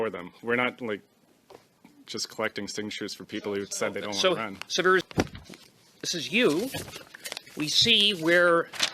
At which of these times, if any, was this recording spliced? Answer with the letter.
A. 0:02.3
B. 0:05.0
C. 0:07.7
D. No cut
B